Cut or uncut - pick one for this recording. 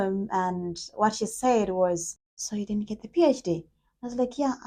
uncut